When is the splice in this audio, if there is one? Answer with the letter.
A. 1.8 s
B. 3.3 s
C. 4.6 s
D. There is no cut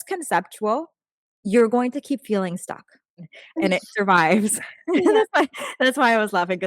B